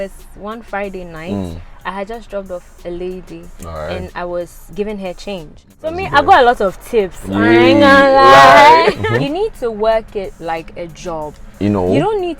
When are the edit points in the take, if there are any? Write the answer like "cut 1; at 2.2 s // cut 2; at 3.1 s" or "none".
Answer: cut 1; at 5.9 s // cut 2; at 9.0 s